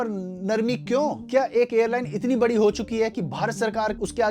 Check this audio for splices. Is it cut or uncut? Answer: cut